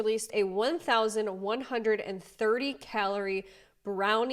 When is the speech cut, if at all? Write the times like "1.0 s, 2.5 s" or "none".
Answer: none